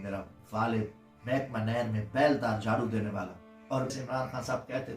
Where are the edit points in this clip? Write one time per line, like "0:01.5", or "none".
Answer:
0:03.9